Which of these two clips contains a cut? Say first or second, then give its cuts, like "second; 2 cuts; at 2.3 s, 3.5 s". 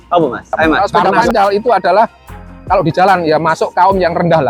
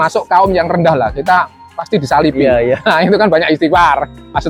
first; 1 cut; at 1.3 s